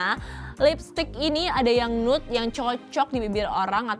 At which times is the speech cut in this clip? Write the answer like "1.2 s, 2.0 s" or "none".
none

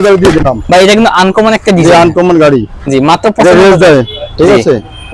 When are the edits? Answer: none

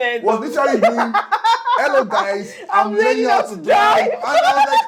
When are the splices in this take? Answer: none

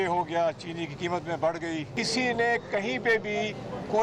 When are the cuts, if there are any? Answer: 1.9 s

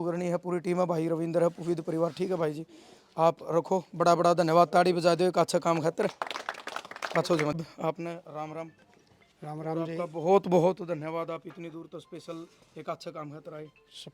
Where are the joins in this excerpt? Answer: 7.6 s

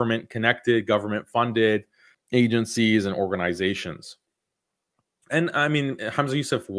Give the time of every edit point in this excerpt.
none

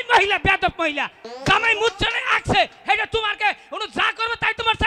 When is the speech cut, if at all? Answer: none

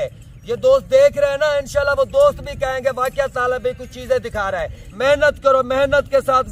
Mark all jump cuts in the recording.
4.8 s

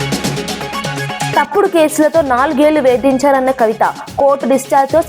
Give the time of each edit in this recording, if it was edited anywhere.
1.3 s

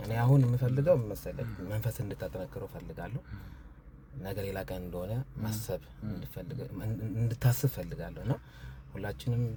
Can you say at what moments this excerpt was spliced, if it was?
none

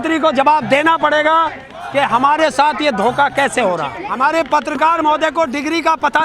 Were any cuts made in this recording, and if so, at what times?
4.0 s

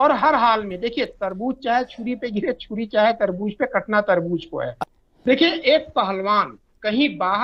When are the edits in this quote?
4.8 s

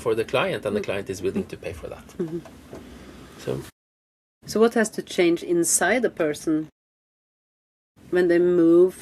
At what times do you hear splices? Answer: none

